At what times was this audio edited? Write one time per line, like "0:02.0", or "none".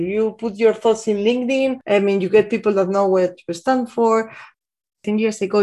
0:04.6